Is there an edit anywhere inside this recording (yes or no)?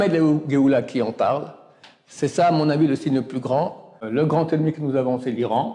yes